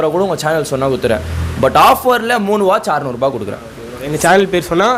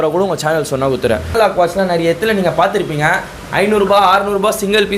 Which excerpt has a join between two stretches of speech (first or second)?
second